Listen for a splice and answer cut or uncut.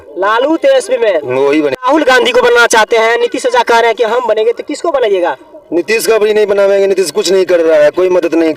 cut